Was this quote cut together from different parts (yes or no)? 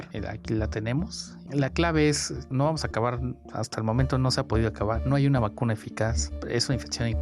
yes